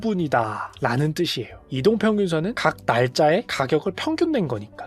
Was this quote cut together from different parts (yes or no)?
yes